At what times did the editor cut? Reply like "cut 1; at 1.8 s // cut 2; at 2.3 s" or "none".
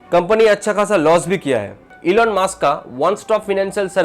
cut 1; at 1.9 s

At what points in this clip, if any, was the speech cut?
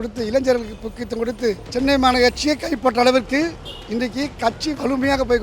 cut 1; at 1.6 s

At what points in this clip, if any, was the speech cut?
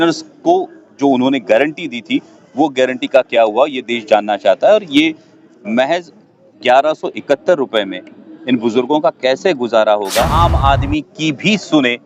cut 1; at 10.3 s

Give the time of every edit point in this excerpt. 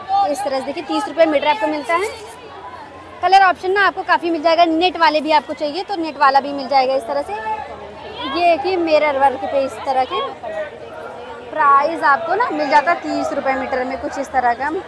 none

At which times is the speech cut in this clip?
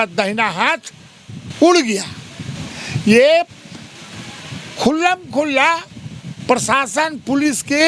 none

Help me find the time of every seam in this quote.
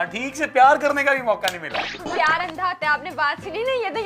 cut 1; at 1.8 s

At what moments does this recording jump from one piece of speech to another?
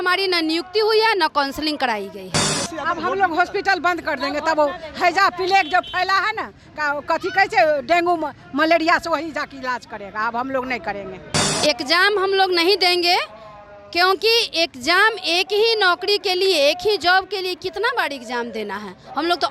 cut 1; at 2.5 s // cut 2; at 11.4 s

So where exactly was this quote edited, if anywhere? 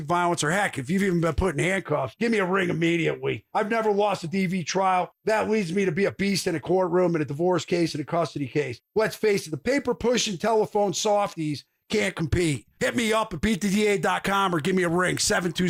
none

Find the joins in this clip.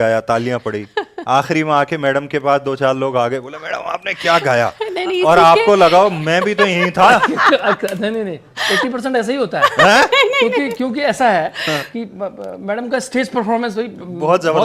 none

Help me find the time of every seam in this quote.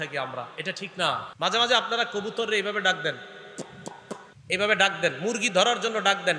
cut 1; at 1.3 s // cut 2; at 4.3 s

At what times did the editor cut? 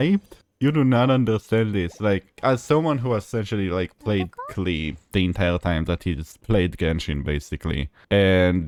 none

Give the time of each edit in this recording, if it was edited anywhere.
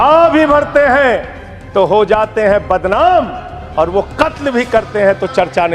none

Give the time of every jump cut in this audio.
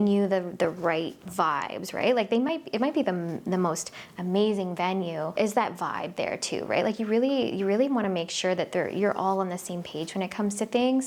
none

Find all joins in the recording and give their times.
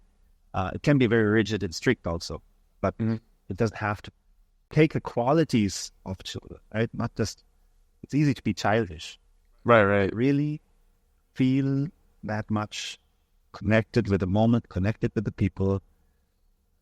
cut 1; at 4.6 s

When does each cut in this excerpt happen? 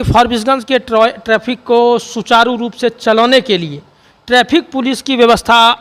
none

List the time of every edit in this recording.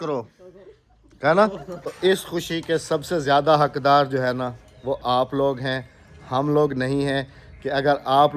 cut 1; at 1.9 s

